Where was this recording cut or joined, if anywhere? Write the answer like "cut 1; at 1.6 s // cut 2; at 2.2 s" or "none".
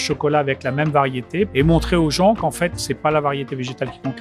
cut 1; at 1.5 s // cut 2; at 2.9 s

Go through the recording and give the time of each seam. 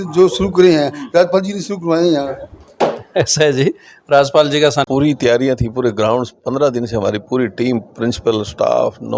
cut 1; at 4.9 s

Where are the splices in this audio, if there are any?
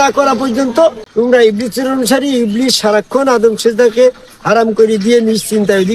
cut 1; at 1.0 s

